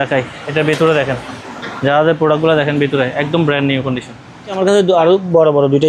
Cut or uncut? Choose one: cut